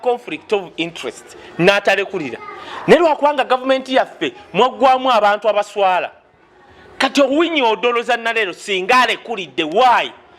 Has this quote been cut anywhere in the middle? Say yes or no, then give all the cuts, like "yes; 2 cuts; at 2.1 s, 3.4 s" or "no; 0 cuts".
no; 0 cuts